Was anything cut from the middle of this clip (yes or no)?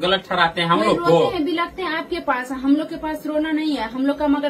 no